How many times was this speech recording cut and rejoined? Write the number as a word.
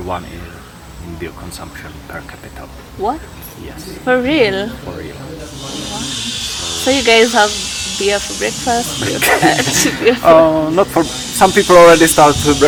zero